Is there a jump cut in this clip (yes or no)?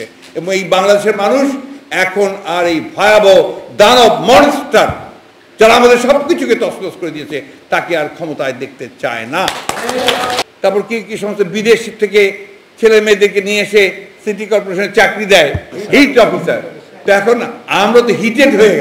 yes